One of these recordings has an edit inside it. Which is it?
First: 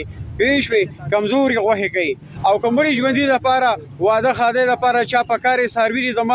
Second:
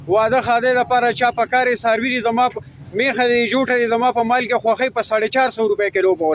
first; 1 cut; at 2.3 s

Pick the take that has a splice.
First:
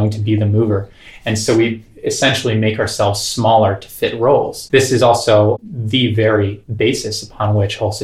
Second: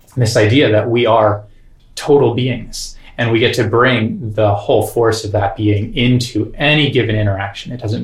first; 3 cuts; at 4.6 s, 5.6 s, 6.6 s

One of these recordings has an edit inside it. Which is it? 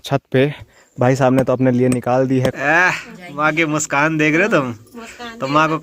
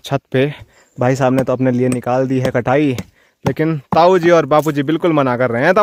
first; 1 cut; at 2.5 s

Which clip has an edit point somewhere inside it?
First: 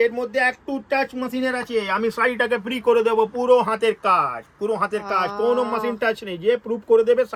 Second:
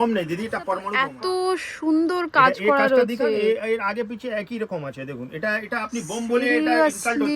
second; 1 cut; at 0.9 s

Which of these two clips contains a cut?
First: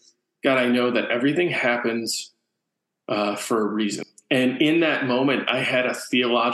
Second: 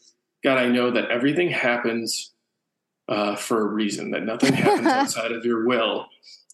first; 1 cut; at 4.0 s

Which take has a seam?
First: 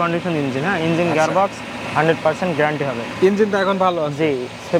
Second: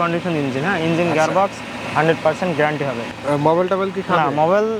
second; 1 cut; at 3.1 s

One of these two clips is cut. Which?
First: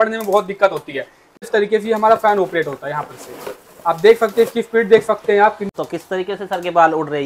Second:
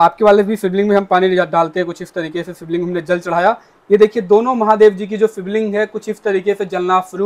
first; 2 cuts; at 1.5 s, 5.7 s

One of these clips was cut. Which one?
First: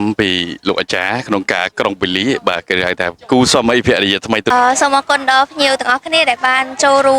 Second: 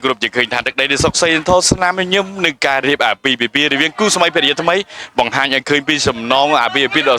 first; 1 cut; at 4.5 s

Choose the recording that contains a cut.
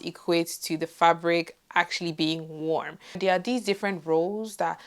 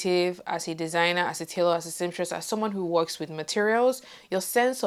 first; 1 cut; at 3.2 s

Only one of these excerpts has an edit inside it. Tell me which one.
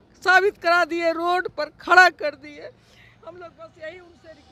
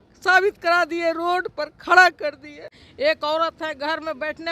second; 1 cut; at 2.8 s

